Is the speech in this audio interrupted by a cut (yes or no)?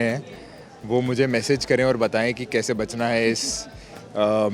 no